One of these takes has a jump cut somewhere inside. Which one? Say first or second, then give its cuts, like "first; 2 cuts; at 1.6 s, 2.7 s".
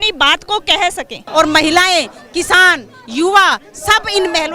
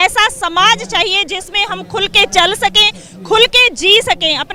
first; 1 cut; at 1.2 s